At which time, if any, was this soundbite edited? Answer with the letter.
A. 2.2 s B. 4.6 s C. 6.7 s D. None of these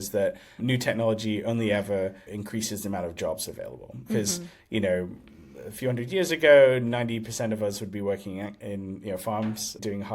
A